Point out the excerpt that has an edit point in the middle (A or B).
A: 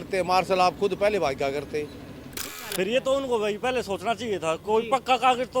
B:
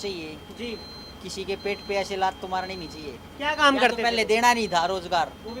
A